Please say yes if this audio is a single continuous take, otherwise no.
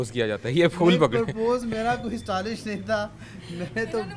yes